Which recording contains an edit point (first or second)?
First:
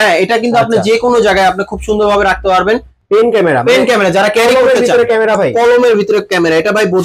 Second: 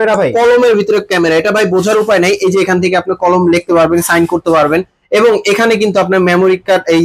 first